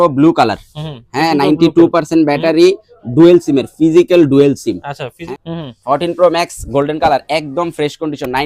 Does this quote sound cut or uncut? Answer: cut